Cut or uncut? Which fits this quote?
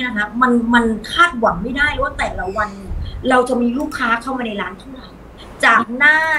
cut